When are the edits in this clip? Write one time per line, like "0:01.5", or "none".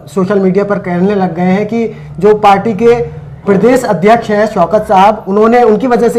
none